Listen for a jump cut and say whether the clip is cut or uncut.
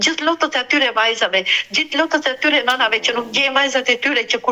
uncut